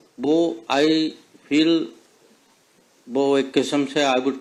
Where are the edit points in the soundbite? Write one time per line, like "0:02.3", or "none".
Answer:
none